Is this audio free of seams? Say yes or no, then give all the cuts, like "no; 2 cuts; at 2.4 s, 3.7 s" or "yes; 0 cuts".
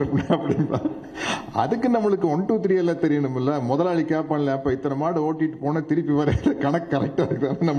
yes; 0 cuts